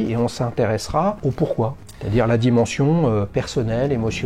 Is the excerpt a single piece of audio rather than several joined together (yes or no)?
no